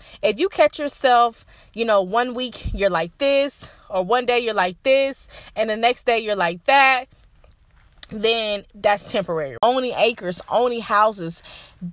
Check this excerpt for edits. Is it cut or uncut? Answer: cut